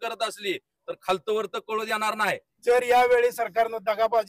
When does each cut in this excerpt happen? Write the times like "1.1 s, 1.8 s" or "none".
2.5 s